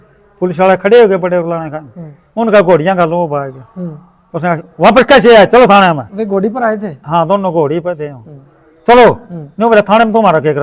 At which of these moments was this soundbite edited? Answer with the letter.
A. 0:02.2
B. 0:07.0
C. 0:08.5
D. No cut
D